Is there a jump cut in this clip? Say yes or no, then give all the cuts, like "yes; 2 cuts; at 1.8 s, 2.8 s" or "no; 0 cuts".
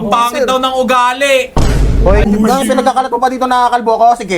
yes; 1 cut; at 2.2 s